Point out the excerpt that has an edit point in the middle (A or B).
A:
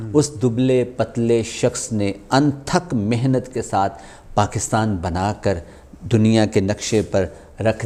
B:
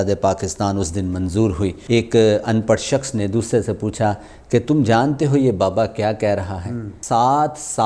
B